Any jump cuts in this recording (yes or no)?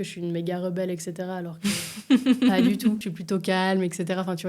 yes